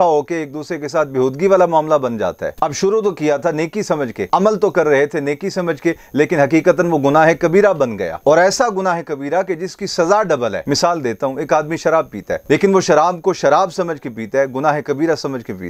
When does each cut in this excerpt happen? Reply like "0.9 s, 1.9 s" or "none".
none